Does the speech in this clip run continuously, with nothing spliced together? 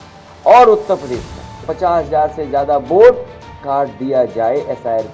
no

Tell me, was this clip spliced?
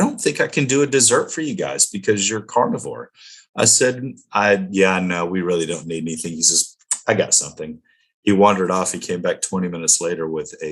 no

